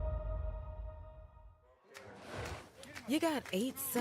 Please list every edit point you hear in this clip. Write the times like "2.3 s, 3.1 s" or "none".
1.5 s

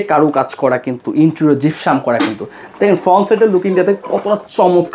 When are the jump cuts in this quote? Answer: none

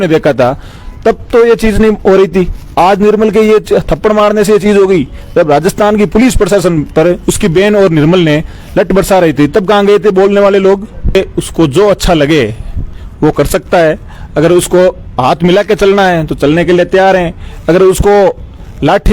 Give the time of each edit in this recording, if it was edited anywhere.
11.1 s

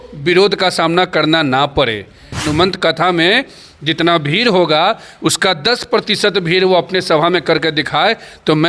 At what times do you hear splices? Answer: 2.4 s

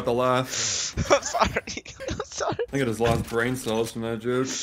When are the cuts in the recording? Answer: 2.7 s

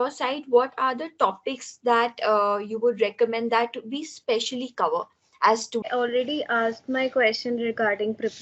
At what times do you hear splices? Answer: 5.9 s

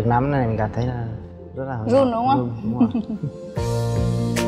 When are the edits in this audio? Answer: none

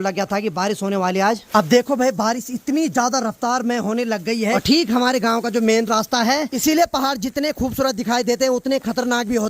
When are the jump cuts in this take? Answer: 1.4 s, 4.6 s, 6.5 s

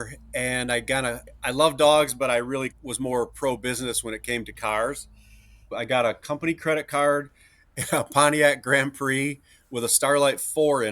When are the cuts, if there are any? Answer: 1.3 s, 2.7 s, 5.7 s

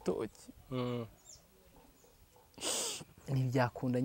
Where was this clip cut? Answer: 3.2 s

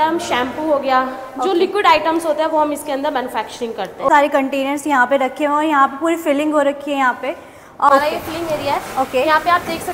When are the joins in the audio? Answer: 4.1 s, 7.9 s

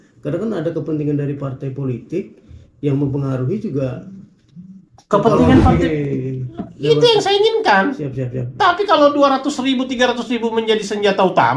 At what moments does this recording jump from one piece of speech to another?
5.7 s

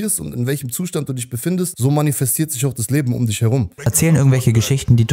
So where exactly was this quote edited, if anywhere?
1.7 s, 3.8 s

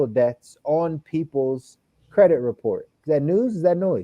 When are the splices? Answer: 2.9 s

